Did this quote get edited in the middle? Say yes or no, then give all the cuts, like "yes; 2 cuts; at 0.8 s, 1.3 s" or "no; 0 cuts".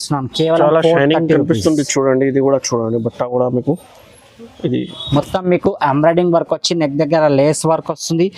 yes; 1 cut; at 5.0 s